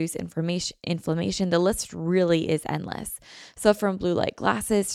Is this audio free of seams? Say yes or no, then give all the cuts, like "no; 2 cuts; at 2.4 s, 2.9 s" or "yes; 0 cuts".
yes; 0 cuts